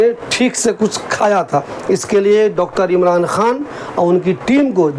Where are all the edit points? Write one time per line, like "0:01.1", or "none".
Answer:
0:01.7